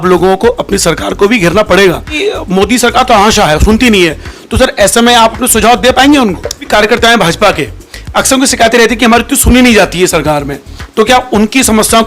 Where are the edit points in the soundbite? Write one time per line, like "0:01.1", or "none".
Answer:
0:02.1
0:06.6

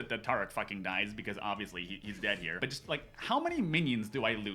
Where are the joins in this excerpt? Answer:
0:02.6

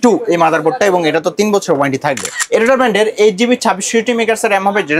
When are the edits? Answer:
0:02.3

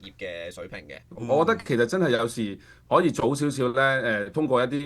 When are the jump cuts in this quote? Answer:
0:01.2

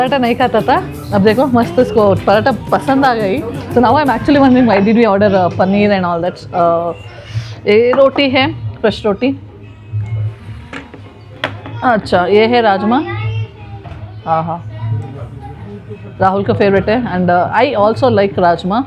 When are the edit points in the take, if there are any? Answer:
none

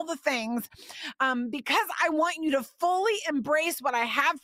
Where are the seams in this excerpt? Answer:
none

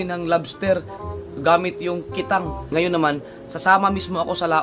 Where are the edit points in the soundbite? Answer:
0:02.7

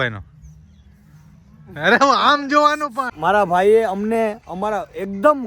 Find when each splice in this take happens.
0:03.1

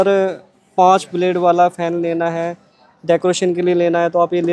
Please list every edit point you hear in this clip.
none

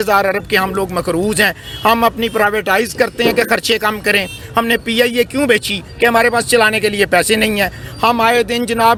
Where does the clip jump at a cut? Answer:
none

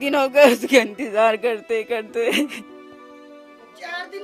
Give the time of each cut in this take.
none

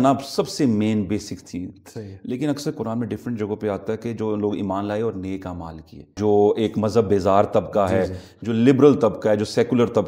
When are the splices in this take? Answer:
0:06.2

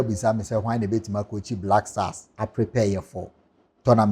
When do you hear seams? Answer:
none

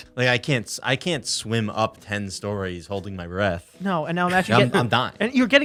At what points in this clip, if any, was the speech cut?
none

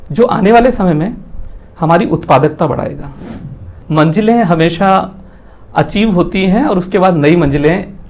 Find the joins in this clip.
0:03.8

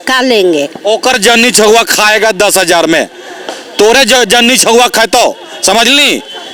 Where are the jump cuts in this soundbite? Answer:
none

